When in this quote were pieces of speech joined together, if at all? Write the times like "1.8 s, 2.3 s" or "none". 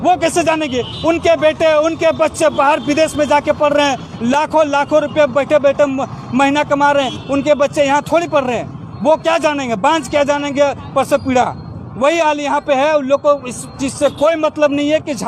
none